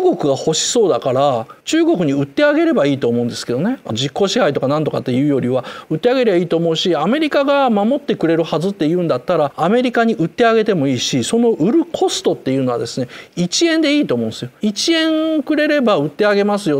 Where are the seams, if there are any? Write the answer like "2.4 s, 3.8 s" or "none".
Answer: none